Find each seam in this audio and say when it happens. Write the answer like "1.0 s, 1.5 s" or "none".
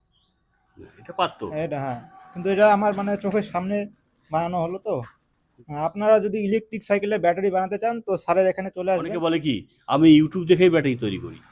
5.6 s, 9.2 s